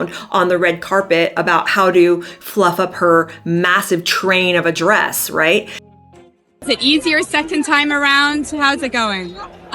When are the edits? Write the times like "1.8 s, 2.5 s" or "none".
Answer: 6.0 s

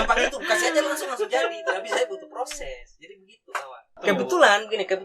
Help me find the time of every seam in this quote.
4.0 s

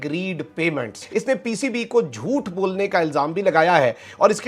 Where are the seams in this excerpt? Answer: 1.0 s

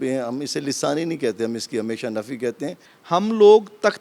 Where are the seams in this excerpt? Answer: 2.9 s

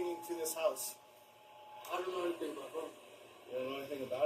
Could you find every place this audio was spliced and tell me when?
1.7 s

